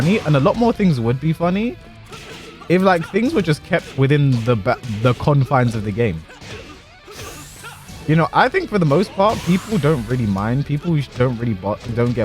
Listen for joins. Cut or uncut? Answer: uncut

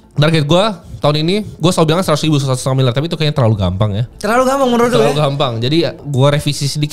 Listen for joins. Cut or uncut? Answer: cut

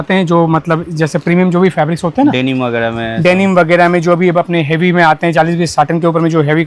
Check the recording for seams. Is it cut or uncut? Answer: uncut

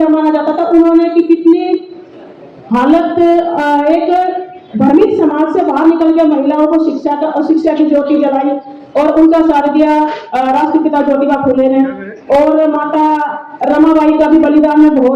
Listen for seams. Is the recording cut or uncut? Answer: uncut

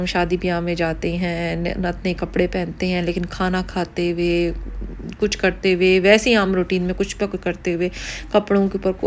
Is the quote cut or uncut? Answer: uncut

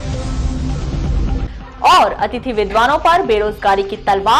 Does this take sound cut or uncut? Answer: cut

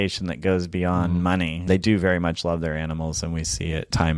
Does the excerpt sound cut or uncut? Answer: cut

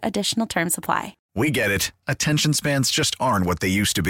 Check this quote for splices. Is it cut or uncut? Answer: cut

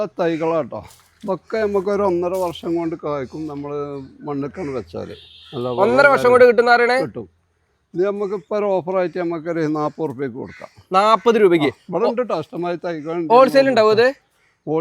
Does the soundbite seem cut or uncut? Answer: uncut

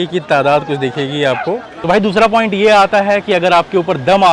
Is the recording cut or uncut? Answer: cut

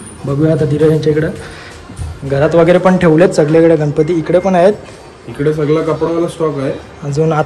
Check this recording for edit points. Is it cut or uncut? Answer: uncut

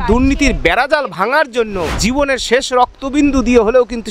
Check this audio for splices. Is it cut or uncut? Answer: cut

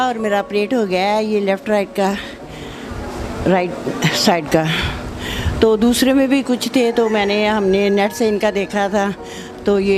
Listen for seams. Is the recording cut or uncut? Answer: uncut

